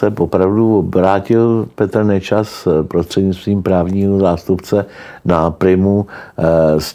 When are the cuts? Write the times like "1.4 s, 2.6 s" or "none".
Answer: none

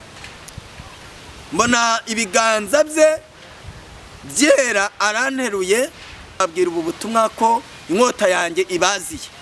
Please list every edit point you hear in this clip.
6.4 s

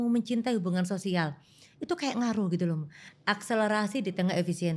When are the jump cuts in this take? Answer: 3.0 s

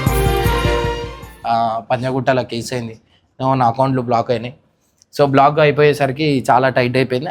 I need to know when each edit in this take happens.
1.2 s

